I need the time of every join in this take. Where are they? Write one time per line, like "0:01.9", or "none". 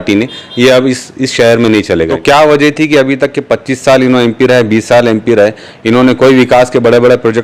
0:02.1